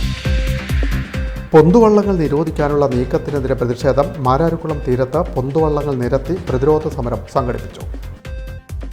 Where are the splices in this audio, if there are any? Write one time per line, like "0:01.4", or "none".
none